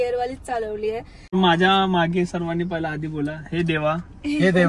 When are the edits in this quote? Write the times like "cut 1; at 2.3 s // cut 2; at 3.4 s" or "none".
cut 1; at 1.3 s